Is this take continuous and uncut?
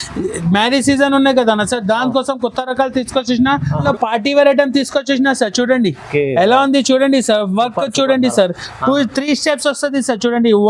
no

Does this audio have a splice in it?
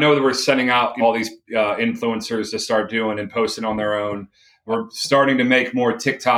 yes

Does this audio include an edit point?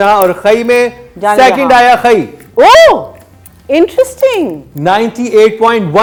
no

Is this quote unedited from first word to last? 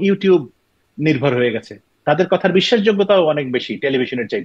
no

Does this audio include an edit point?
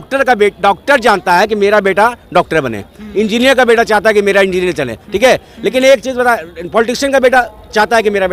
no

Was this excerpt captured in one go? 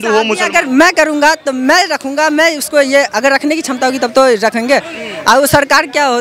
yes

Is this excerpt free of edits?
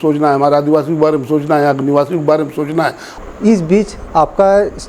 no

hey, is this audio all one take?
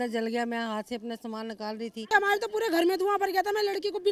no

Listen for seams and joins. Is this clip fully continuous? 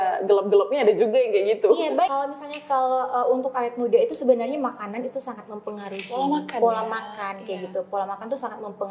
no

